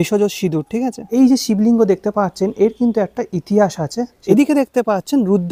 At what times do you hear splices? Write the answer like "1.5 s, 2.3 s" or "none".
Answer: 1.1 s, 4.4 s